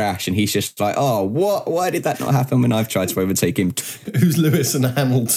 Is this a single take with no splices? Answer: no; 1 cut; at 3.8 s

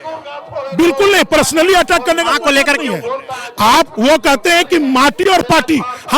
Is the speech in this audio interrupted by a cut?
no; 0 cuts

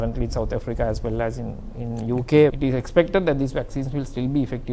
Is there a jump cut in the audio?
yes; 1 cut; at 2.5 s

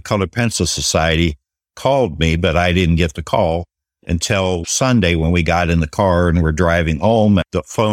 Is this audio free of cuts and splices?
yes; 0 cuts

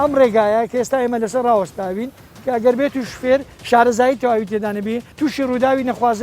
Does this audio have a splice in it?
yes; 1 cut; at 5.1 s

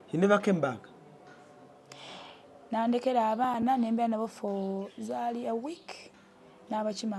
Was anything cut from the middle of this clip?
no; 0 cuts

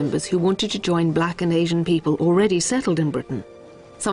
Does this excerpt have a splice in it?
no; 0 cuts

